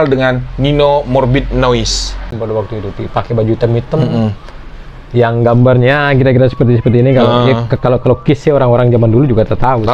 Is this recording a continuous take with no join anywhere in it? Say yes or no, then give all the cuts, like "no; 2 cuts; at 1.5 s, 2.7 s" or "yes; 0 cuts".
no; 1 cut; at 2.3 s